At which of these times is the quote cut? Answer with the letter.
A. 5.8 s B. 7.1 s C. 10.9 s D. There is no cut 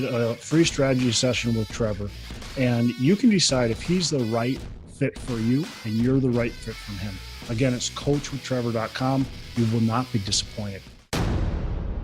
C